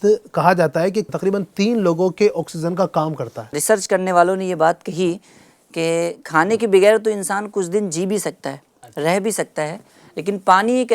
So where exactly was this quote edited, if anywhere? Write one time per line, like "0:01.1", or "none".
0:01.1
0:03.6